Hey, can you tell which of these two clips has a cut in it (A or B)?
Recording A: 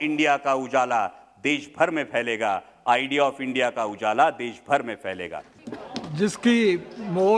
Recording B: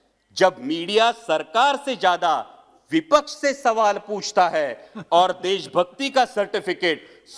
A